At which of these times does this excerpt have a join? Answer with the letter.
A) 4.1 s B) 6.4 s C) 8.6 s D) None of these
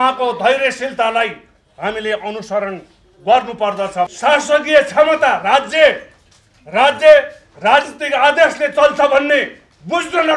A